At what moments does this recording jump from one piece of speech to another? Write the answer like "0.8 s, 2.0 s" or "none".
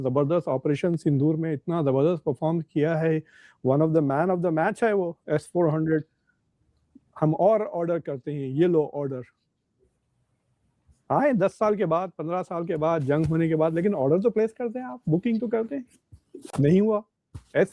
none